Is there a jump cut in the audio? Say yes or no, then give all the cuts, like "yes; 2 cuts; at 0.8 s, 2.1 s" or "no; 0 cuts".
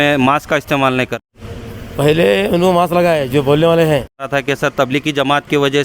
yes; 2 cuts; at 1.1 s, 4.3 s